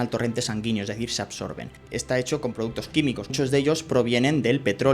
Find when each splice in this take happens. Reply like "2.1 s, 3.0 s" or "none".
1.7 s, 3.3 s